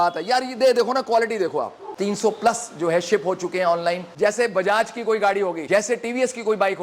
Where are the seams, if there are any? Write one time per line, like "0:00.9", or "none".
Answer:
0:01.8
0:04.1
0:05.6